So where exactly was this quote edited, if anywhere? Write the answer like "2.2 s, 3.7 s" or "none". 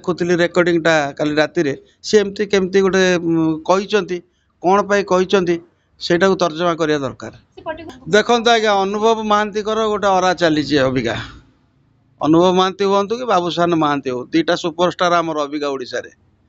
7.9 s